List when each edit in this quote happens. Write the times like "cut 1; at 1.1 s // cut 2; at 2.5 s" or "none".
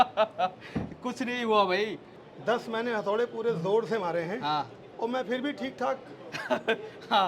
cut 1; at 2.1 s // cut 2; at 4.8 s

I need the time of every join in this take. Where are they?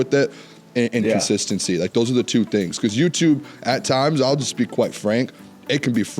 none

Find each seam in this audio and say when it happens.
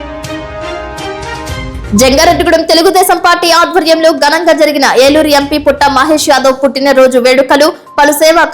cut 1; at 1.5 s

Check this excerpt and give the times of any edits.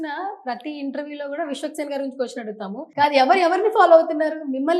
cut 1; at 2.8 s

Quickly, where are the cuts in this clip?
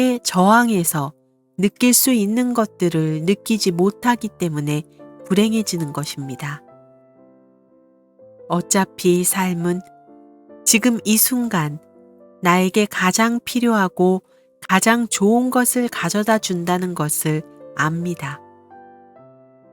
cut 1; at 6.6 s // cut 2; at 8.5 s // cut 3; at 18.4 s

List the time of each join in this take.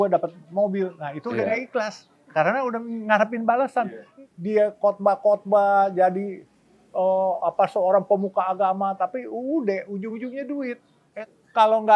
cut 1; at 4.0 s // cut 2; at 11.0 s

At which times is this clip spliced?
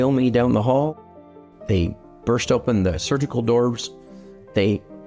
cut 1; at 0.9 s

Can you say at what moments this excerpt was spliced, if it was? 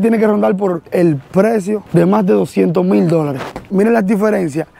cut 1; at 1.8 s // cut 2; at 3.6 s

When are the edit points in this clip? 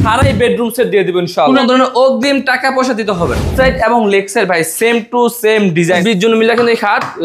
cut 1; at 1.4 s // cut 2; at 3.5 s // cut 3; at 6.0 s

